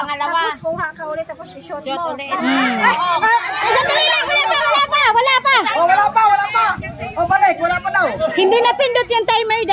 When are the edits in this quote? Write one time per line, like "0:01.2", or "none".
0:03.2